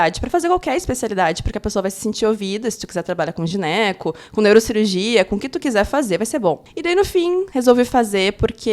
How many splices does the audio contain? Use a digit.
2